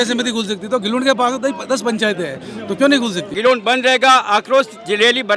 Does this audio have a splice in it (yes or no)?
yes